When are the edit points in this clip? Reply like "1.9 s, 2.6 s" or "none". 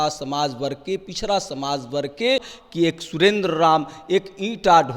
2.6 s